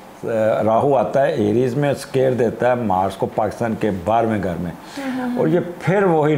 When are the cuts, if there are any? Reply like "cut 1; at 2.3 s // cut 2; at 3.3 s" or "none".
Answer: none